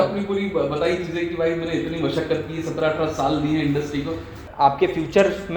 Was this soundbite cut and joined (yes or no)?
yes